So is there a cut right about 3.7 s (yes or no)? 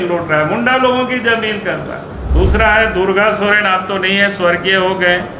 no